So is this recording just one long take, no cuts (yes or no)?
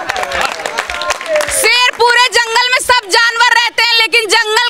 yes